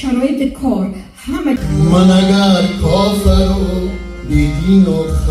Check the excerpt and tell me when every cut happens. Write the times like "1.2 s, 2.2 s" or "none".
1.6 s

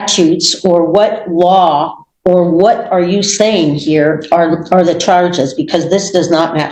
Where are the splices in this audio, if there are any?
none

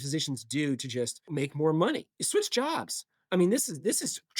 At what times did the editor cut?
1.3 s, 2.1 s

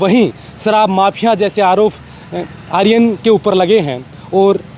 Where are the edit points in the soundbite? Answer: none

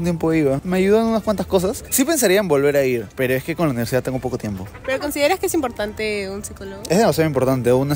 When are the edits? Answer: none

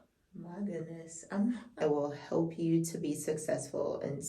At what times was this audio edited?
1.7 s

